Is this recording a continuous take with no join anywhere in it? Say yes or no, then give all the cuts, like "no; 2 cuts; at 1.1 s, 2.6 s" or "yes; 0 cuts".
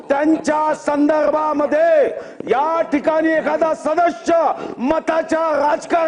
yes; 0 cuts